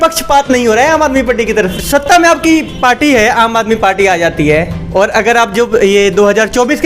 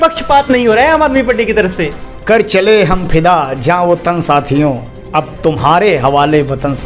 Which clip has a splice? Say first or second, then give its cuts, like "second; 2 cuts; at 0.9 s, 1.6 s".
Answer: first; 1 cut; at 1.8 s